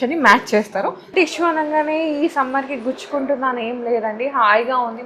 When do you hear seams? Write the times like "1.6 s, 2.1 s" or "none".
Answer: 1.0 s

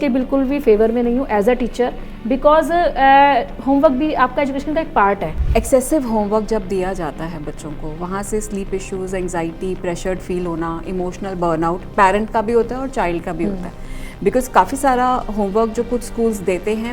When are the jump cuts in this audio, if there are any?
5.3 s

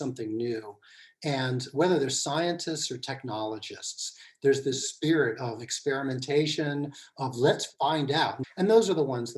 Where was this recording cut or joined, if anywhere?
8.4 s

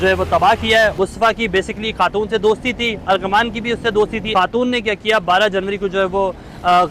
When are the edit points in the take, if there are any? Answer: 1.0 s, 4.3 s

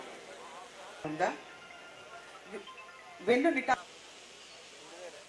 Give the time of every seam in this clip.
1.1 s

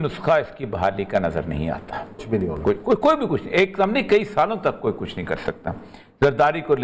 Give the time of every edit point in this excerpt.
none

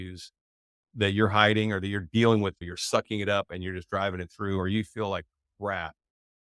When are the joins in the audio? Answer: 2.7 s

